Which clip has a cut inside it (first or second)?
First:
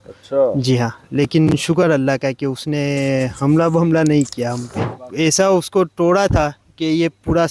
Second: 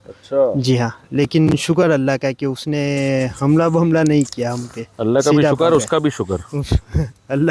first